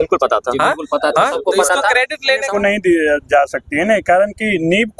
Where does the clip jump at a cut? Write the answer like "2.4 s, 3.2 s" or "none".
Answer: 2.5 s